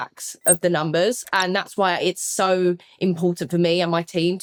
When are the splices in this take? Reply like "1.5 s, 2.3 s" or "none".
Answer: none